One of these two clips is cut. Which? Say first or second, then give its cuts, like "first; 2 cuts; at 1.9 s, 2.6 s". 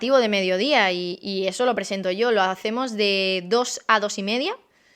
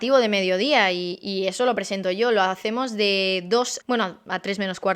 second; 1 cut; at 3.8 s